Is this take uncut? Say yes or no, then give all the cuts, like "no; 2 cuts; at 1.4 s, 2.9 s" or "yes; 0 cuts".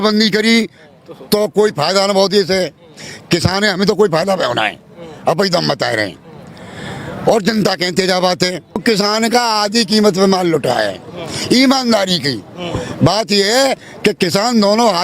no; 1 cut; at 8.8 s